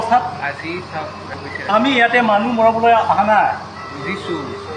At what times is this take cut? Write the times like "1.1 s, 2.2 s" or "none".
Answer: 1.3 s